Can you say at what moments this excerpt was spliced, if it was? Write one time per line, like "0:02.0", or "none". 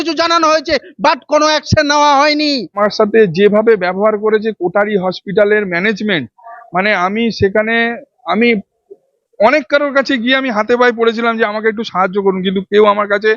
0:02.7